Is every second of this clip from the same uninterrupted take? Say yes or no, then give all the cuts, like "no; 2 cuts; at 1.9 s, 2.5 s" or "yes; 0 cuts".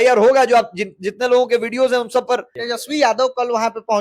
no; 1 cut; at 2.6 s